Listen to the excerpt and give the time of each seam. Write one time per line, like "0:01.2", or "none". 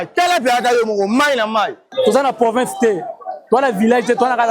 0:01.8